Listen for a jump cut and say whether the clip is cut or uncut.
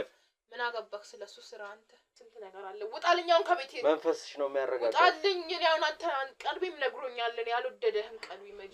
cut